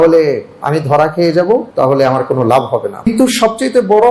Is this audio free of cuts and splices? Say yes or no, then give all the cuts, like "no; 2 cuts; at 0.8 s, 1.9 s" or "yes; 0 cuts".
no; 2 cuts; at 1.7 s, 3.1 s